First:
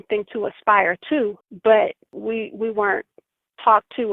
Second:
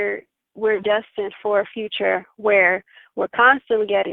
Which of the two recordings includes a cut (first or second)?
first